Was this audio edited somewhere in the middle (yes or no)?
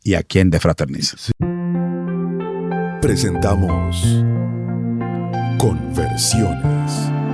yes